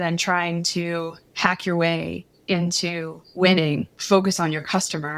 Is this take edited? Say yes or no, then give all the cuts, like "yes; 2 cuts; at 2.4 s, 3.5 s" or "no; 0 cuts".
yes; 2 cuts; at 1.2 s, 3.9 s